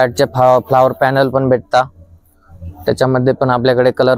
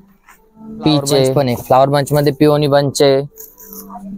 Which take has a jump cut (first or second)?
second